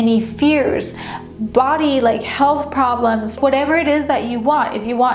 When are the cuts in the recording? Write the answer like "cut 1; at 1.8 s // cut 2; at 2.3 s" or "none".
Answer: cut 1; at 3.3 s

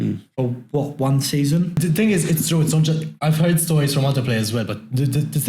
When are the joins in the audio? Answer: cut 1; at 1.8 s

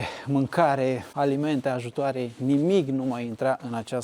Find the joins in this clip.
cut 1; at 1.1 s

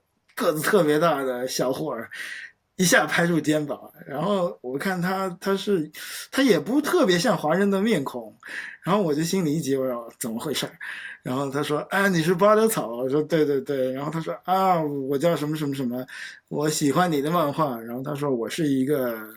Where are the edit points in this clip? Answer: none

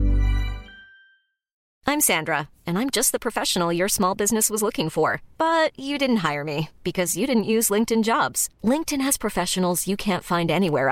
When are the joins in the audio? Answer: cut 1; at 1.6 s

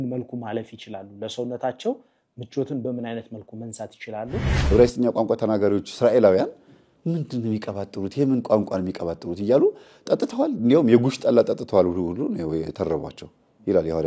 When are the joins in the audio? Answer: cut 1; at 4.5 s

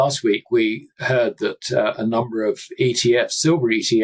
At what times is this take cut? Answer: cut 1; at 0.9 s

